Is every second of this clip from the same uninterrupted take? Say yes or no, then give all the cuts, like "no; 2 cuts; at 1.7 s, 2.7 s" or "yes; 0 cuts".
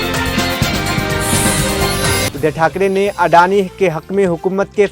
yes; 0 cuts